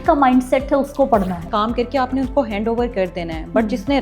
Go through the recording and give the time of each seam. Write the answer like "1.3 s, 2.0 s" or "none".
1.4 s